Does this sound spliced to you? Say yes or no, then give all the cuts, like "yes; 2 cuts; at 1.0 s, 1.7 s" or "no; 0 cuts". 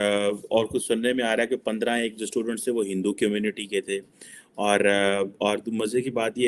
no; 0 cuts